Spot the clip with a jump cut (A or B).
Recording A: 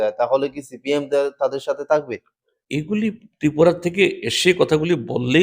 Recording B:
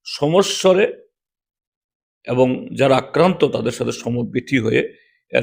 A